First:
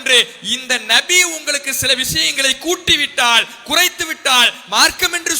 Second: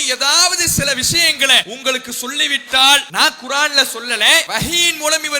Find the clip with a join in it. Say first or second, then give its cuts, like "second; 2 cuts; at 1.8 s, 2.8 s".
second; 3 cuts; at 1.7 s, 3.1 s, 4.5 s